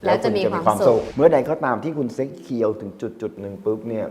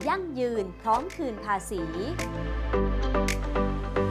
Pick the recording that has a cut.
first; 1 cut; at 1.1 s

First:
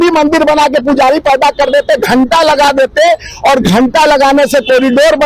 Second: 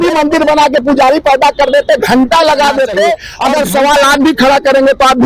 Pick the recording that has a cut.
second; 1 cut; at 3.3 s

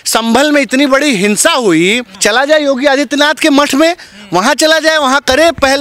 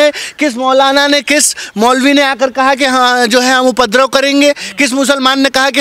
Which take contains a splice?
first; 1 cut; at 2.1 s

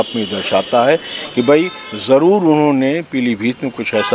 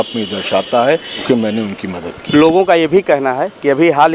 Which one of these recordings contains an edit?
second; 1 cut; at 1.1 s

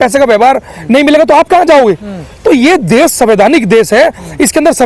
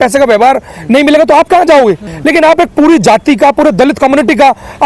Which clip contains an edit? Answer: second; 1 cut; at 2.1 s

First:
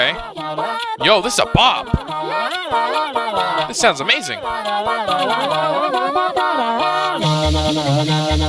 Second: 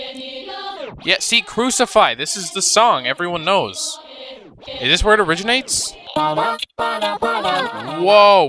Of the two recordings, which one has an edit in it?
second; 1 cut; at 6.0 s

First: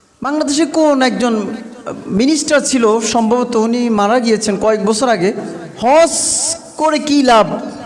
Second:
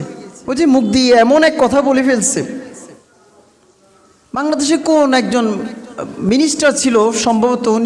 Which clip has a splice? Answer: second; 1 cut; at 3.0 s

